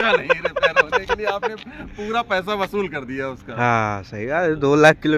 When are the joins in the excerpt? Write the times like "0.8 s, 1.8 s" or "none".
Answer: none